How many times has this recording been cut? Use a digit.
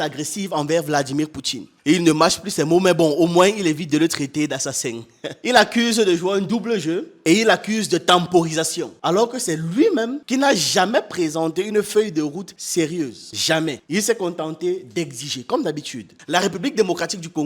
1